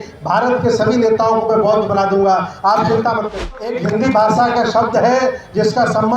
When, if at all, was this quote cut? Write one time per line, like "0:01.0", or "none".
0:03.7